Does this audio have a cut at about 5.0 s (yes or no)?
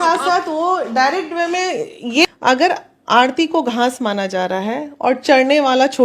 no